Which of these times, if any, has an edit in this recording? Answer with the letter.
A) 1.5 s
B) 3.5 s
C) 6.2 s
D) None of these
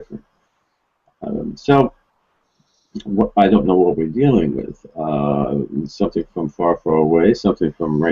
D